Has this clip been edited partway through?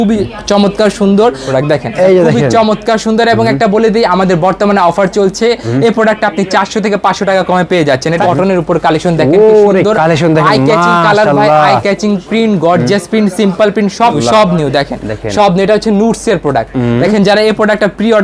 yes; 3 cuts; at 1.4 s, 8.2 s, 14.2 s

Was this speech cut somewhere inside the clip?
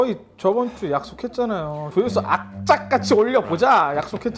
yes; 1 cut; at 1.8 s

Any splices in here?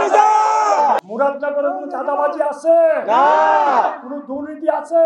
yes; 1 cut; at 1.0 s

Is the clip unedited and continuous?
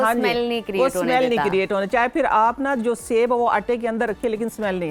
yes; 0 cuts

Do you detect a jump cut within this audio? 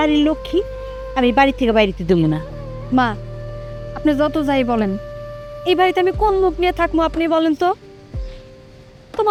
no; 0 cuts

